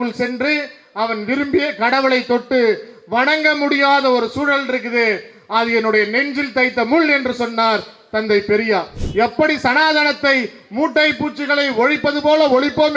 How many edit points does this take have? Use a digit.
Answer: 1